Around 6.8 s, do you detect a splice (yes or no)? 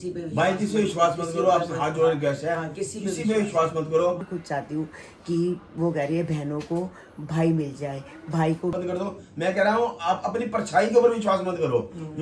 no